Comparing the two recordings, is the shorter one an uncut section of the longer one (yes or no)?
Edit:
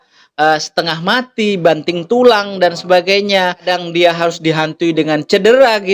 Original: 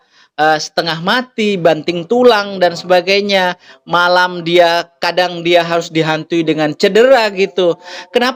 no